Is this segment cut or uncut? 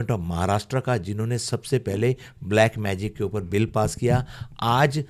uncut